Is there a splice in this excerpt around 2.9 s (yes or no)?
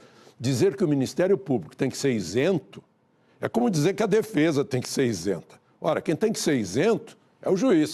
no